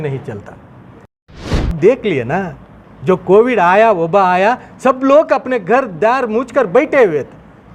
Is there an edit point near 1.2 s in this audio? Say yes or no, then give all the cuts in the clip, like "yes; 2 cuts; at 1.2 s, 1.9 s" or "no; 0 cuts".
yes; 1 cut; at 1.2 s